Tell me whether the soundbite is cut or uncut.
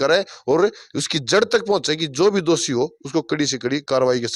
uncut